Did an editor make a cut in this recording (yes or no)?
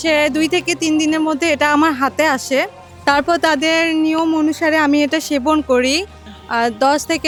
no